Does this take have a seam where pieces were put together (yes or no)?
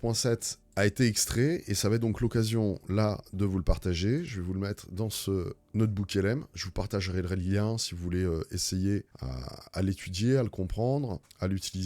no